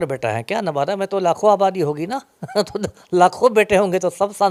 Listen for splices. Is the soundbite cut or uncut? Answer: uncut